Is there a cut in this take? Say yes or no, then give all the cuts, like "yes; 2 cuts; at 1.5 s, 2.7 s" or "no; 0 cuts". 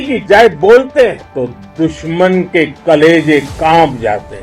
yes; 1 cut; at 1.2 s